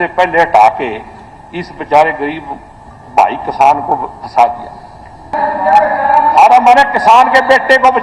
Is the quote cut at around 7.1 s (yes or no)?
no